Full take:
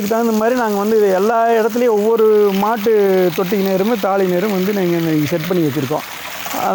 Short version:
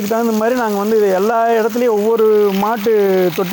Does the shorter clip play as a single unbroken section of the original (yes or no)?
yes